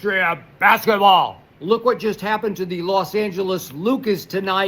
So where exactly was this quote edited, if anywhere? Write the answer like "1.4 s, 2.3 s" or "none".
1.5 s